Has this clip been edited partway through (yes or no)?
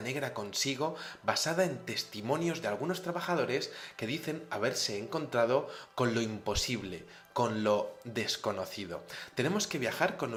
no